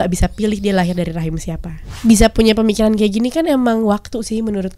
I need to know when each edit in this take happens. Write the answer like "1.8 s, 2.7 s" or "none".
1.9 s